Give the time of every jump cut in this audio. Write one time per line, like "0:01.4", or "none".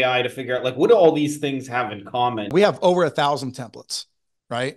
0:02.5